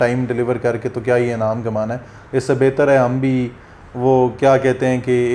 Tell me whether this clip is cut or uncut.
uncut